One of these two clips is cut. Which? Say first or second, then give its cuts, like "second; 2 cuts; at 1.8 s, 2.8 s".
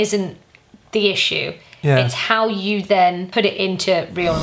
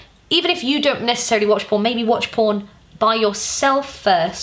first; 1 cut; at 3.2 s